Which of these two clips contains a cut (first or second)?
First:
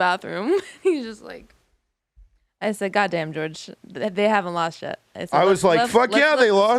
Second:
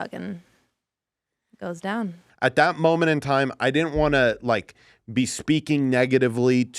second